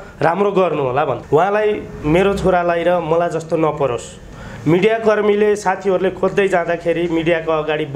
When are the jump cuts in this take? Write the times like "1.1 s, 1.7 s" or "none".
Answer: 1.2 s